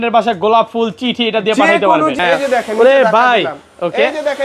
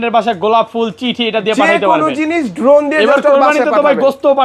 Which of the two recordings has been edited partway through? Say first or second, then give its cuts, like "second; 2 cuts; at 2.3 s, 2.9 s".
first; 1 cut; at 2.1 s